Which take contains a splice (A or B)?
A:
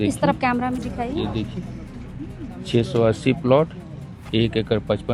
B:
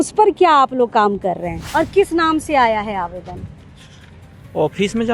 B